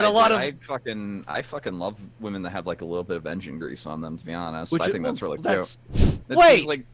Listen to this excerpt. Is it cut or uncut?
cut